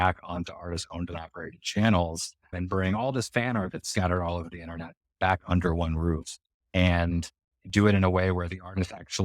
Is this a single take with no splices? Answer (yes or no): no